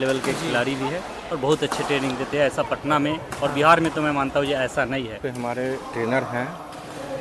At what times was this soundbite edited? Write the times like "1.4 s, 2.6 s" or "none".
5.2 s